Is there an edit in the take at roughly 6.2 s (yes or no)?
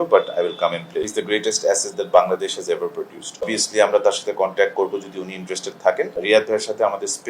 yes